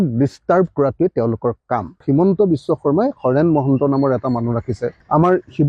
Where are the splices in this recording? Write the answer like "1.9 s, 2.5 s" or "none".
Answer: 2.0 s